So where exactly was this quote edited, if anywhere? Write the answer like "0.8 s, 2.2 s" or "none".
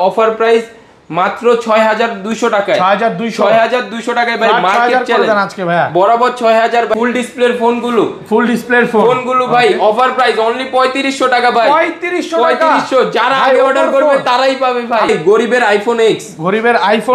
6.9 s, 15.4 s

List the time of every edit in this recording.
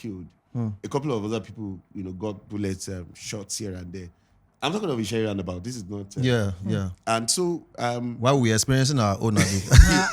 none

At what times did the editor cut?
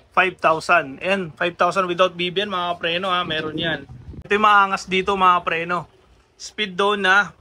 4.3 s

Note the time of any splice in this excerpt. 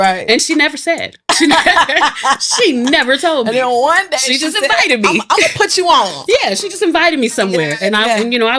1.2 s

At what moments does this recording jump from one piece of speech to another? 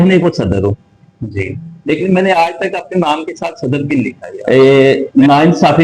4.3 s

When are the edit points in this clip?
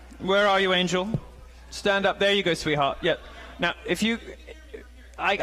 2.7 s

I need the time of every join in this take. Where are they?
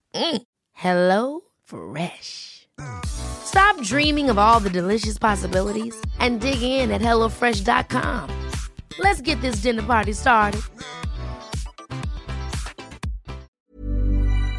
13.6 s

